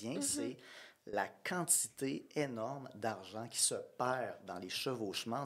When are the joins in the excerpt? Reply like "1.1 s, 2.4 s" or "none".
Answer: none